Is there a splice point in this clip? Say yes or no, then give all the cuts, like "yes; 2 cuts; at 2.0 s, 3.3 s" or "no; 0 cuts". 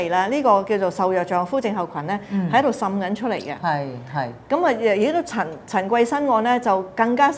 no; 0 cuts